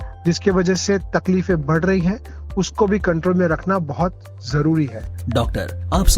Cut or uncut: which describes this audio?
cut